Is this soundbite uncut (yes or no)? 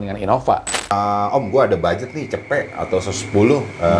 no